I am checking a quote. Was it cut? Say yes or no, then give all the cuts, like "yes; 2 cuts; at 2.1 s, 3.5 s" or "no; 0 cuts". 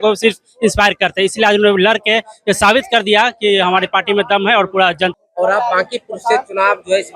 yes; 1 cut; at 5.1 s